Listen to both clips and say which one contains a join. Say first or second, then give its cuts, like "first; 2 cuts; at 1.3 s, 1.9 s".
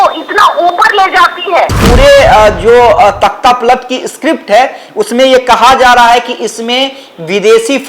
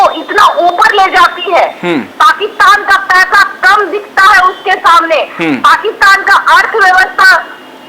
first; 1 cut; at 1.8 s